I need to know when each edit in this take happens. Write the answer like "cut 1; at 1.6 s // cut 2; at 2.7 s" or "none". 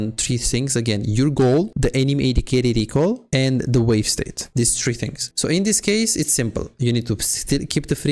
cut 1; at 1.7 s // cut 2; at 4.4 s // cut 3; at 5.2 s